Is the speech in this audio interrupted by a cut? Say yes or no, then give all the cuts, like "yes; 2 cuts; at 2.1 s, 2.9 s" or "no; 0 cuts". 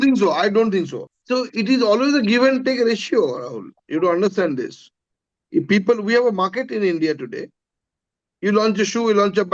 yes; 1 cut; at 1.1 s